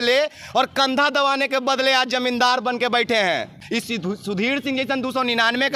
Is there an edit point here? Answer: yes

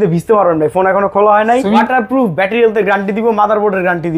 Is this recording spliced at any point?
yes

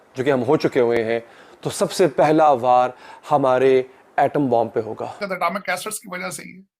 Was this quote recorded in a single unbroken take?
no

